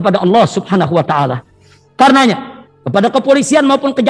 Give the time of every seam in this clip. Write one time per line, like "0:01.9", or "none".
none

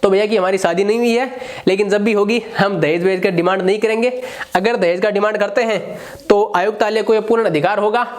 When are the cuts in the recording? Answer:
none

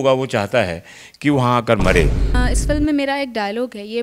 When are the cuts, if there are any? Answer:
0:02.4

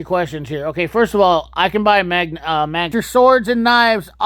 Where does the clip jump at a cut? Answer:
0:03.0

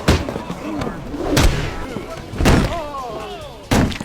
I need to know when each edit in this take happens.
0:01.5

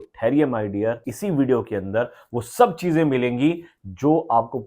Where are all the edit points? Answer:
0:01.1

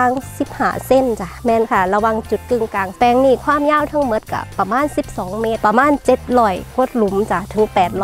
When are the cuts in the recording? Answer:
0:01.3
0:02.9
0:05.6

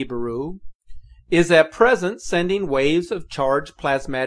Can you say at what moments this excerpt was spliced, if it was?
none

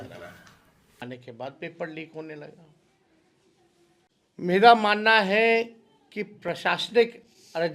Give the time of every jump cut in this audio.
0:01.0

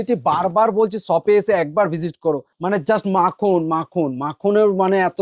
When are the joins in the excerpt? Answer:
0:02.5

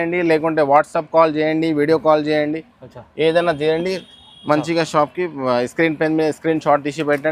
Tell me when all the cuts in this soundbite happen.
none

